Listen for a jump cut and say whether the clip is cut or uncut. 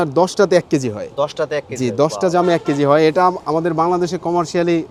uncut